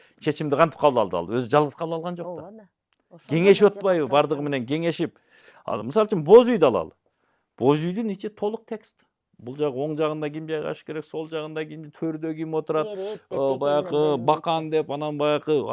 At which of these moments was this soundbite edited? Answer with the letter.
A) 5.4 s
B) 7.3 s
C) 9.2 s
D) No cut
A